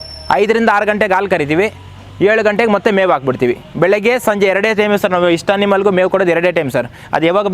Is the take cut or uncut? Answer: uncut